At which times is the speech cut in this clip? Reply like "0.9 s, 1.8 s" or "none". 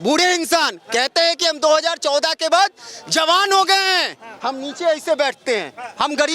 4.3 s